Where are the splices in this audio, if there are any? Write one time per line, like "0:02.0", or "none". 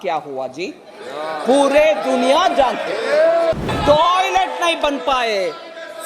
0:03.6